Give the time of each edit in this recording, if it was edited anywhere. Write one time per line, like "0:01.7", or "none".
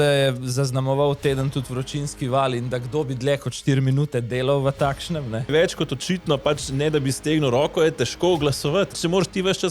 0:05.5
0:08.9

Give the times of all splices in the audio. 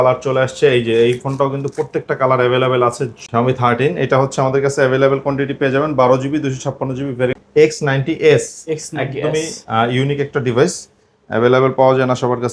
0:03.2
0:07.4

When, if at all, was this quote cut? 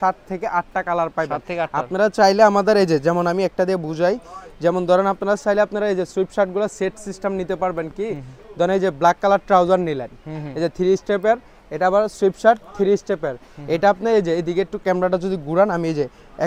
none

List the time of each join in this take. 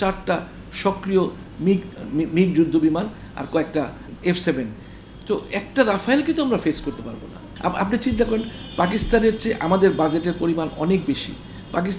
0:01.9
0:04.1
0:07.5

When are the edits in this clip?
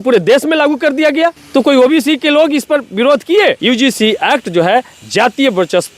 0:01.4
0:03.6

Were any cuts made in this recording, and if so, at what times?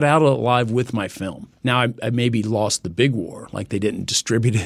0:01.5

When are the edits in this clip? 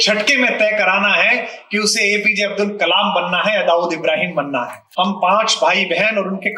0:04.8

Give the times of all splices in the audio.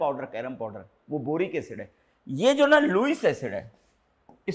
none

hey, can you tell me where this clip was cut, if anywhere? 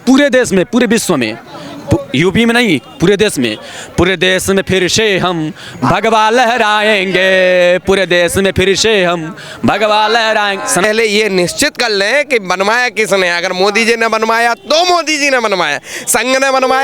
0:10.8

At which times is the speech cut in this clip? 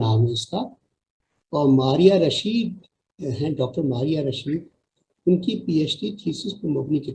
none

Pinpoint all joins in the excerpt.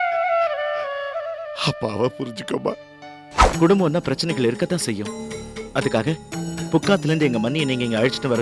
0:03.4

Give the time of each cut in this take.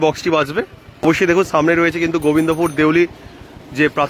none

